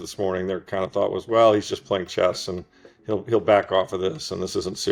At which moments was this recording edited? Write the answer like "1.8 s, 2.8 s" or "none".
none